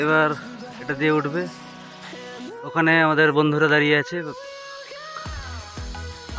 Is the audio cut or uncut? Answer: uncut